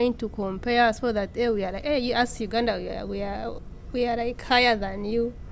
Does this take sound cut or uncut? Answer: uncut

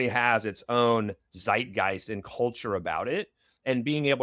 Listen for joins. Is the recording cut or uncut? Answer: uncut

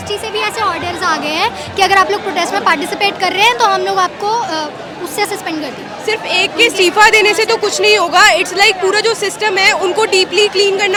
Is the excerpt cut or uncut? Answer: uncut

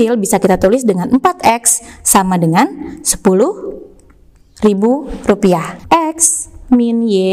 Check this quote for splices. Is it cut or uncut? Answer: cut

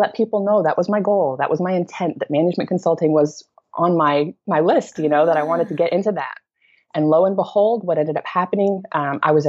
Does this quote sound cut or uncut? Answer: uncut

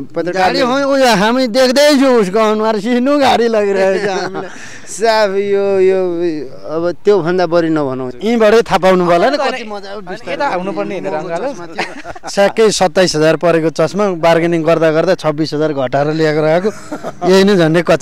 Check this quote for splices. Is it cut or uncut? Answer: cut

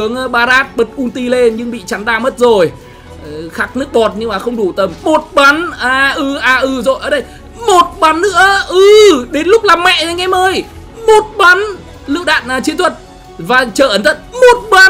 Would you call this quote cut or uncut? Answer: uncut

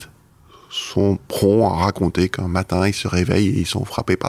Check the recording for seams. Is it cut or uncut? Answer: uncut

